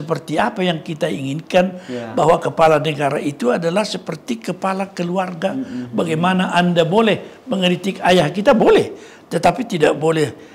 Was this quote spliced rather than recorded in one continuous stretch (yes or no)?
no